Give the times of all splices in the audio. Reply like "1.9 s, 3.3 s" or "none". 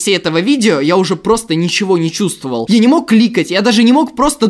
none